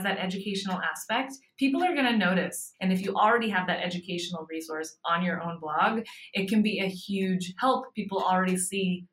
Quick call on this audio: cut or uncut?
cut